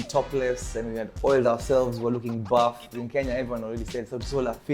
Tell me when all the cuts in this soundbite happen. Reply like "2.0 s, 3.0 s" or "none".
2.9 s

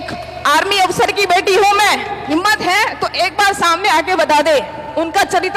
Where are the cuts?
2.2 s

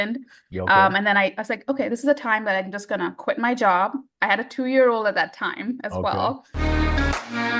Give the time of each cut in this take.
6.5 s

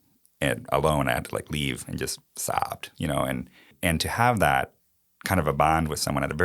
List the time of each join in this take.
3.7 s

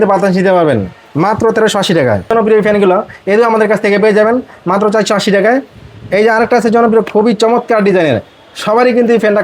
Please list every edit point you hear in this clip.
2.3 s

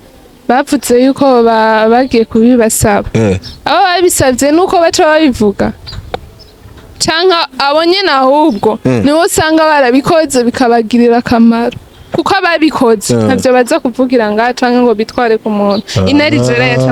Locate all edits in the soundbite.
none

